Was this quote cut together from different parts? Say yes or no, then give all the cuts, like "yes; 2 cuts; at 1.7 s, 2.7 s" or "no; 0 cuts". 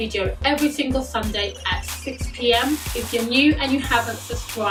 no; 0 cuts